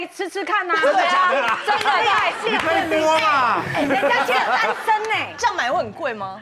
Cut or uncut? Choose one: uncut